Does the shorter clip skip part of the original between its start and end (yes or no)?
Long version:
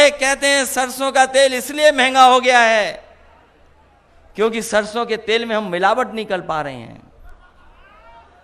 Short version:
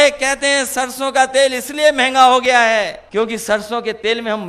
yes